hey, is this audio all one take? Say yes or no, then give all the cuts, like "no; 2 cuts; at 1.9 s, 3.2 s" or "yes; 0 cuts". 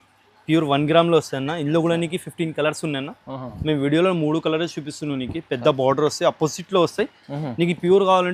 yes; 0 cuts